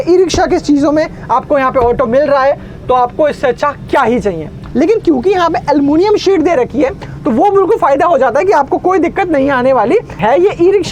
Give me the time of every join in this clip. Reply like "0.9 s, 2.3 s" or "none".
4.6 s, 10.2 s

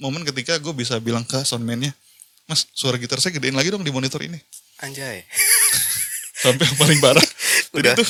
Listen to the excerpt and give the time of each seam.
none

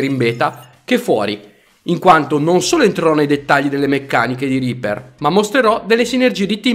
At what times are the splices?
3.4 s

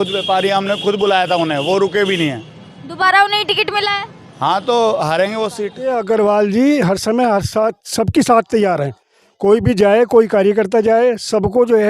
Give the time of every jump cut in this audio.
5.7 s

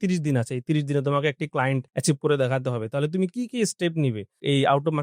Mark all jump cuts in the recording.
1.9 s

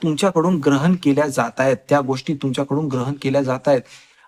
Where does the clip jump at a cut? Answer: none

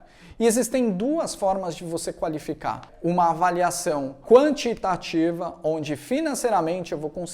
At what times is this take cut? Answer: 2.9 s, 4.2 s

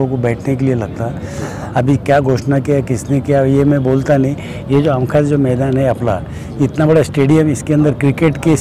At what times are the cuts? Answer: none

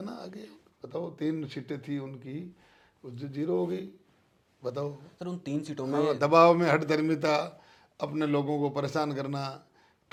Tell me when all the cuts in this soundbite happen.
none

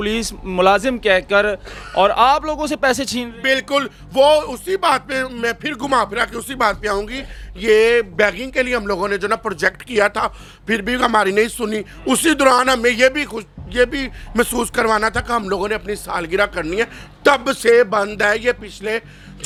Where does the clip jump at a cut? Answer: none

